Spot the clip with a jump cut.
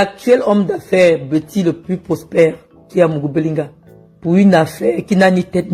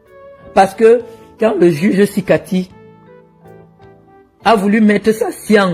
second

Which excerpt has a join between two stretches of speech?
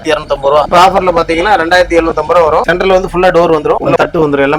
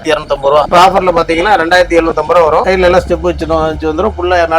first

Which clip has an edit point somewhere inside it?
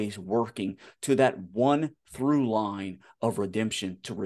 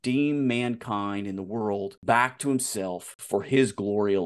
second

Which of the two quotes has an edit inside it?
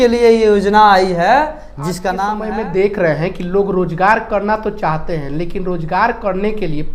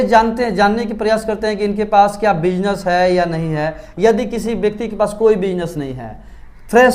first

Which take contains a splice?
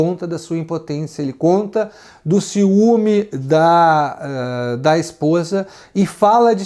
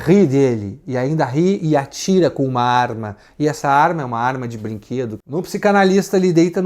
second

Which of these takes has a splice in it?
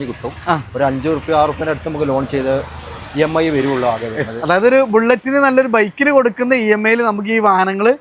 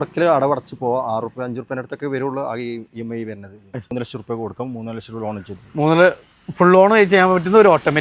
second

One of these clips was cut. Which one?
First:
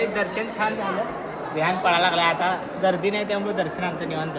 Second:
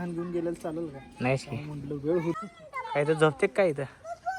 second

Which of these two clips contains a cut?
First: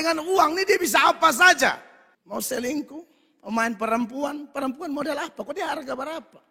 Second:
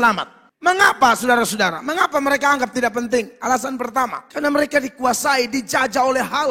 second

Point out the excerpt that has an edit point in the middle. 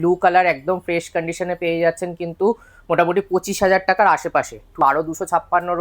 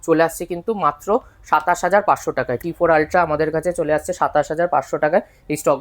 first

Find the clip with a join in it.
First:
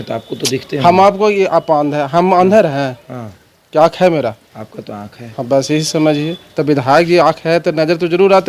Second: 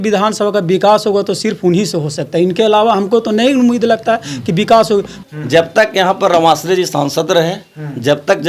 second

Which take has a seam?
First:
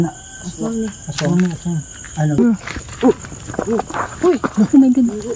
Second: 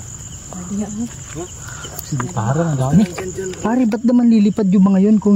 first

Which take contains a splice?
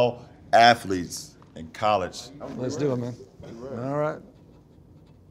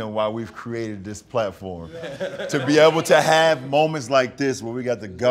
first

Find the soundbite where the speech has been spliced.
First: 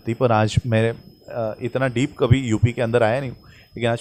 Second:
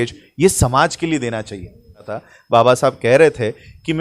second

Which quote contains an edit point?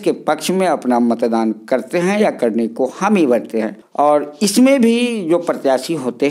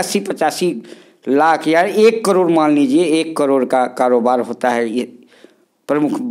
first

